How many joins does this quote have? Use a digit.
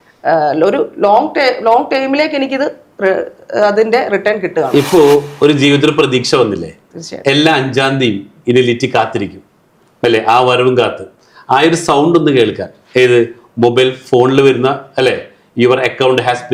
0